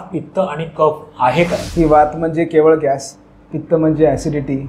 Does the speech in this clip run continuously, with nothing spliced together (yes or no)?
no